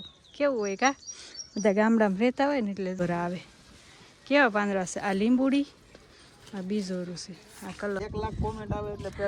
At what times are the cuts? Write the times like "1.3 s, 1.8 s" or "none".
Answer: 3.0 s, 8.0 s